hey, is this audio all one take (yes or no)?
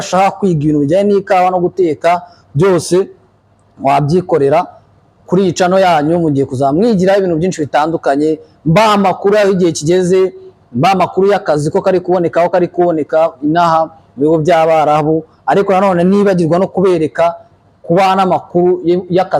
yes